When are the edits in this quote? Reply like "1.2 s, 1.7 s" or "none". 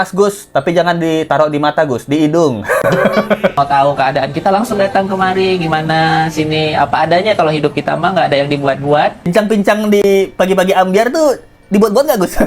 3.5 s, 9.3 s